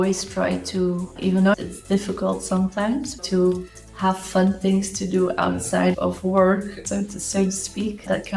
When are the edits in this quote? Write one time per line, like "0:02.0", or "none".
none